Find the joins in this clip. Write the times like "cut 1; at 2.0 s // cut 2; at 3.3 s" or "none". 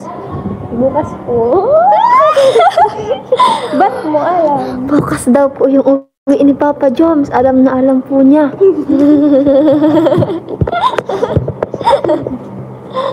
none